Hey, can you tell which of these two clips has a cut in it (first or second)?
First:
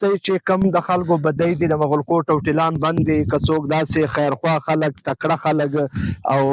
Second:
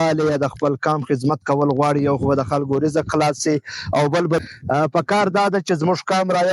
second